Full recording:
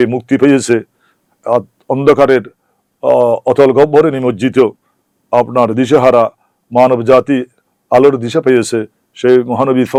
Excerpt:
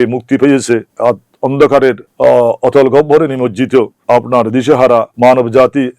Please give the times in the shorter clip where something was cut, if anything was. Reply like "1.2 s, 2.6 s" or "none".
0.9 s, 2.1 s, 4.0 s, 5.1 s